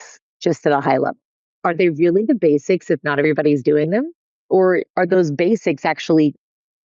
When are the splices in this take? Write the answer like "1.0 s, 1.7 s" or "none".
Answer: 1.6 s, 4.9 s